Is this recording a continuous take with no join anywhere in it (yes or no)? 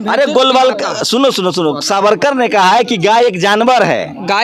yes